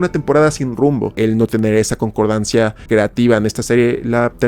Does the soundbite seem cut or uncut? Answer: cut